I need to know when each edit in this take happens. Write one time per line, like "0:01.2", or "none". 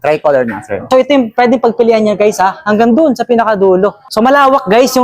0:00.9
0:04.0